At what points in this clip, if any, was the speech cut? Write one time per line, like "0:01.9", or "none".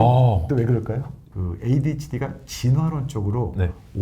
0:01.2